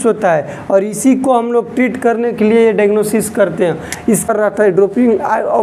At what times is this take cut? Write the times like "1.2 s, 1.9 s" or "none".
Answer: 4.3 s